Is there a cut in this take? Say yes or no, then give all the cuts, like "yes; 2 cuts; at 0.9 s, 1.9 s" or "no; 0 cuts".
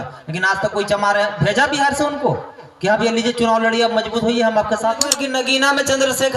yes; 1 cut; at 5.2 s